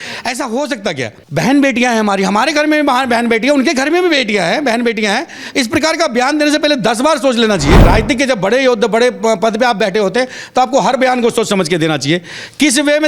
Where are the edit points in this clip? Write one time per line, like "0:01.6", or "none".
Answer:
0:01.2
0:07.8